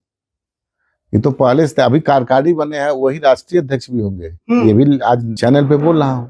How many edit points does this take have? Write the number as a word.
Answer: one